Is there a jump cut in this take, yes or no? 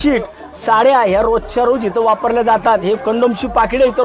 no